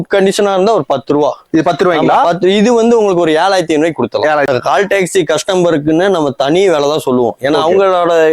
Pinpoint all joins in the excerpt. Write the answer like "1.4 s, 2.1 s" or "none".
4.5 s